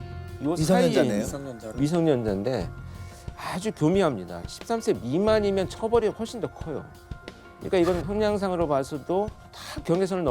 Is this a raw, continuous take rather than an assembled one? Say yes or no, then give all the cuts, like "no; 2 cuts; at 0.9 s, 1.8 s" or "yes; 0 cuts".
yes; 0 cuts